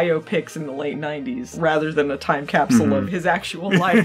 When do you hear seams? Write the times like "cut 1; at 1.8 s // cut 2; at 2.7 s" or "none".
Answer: none